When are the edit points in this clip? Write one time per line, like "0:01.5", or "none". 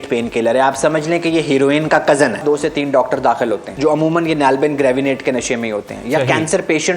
0:02.4
0:03.7